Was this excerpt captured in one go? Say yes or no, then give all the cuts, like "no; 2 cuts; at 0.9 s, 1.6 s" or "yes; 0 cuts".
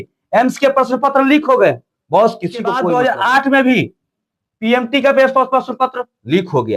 no; 1 cut; at 2.8 s